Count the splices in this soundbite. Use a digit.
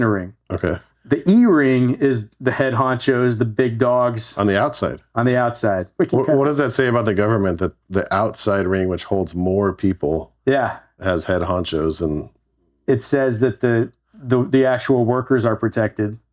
2